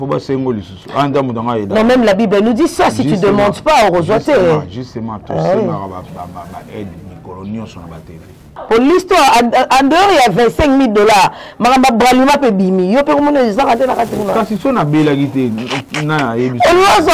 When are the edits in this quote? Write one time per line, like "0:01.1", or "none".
0:08.5